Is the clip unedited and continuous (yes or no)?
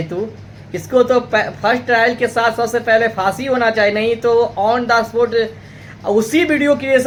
yes